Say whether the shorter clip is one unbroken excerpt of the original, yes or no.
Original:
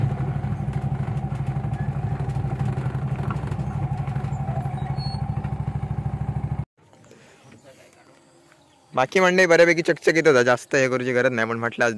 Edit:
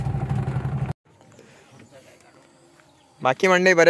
no